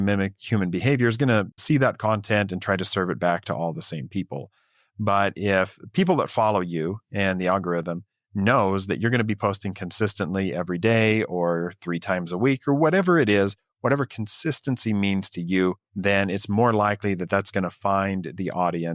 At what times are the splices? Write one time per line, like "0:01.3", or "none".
0:15.9